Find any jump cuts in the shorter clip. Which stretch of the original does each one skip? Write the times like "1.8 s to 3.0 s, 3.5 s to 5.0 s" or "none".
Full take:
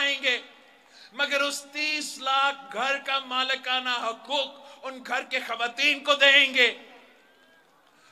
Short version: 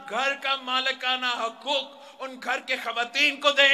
none